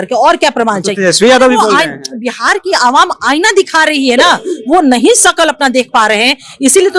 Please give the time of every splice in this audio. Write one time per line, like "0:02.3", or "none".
none